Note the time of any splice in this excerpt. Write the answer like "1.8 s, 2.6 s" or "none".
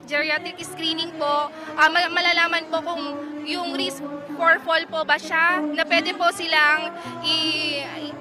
none